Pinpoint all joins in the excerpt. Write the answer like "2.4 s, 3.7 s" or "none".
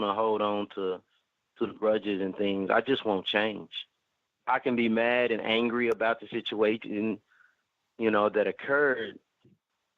4.3 s

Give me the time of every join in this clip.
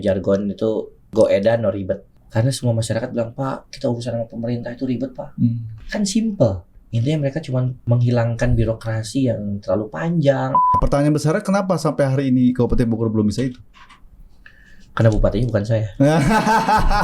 1.0 s, 2.1 s, 5.7 s, 7.8 s, 10.8 s

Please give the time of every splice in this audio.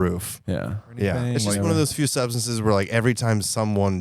1.2 s

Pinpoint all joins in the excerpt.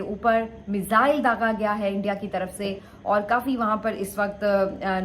2.9 s

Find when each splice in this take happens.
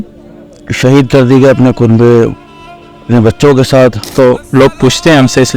4.1 s

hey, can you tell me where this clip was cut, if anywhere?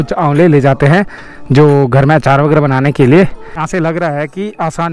3.6 s

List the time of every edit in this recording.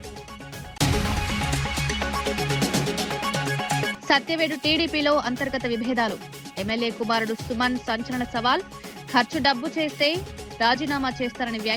0.8 s, 2.1 s, 3.5 s

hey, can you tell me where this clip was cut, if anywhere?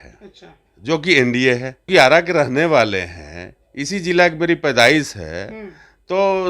1.8 s

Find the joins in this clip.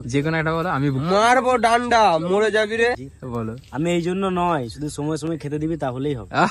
3.1 s

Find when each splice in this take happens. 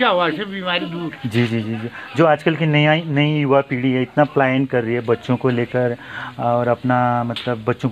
none

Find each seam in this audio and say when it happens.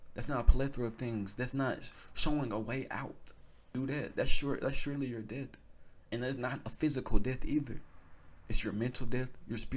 3.7 s

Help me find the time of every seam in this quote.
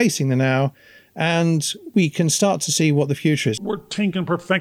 3.6 s

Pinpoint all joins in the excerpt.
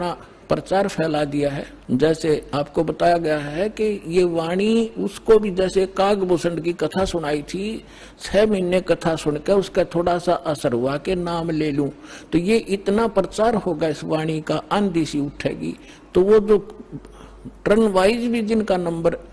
1.7 s, 2.5 s

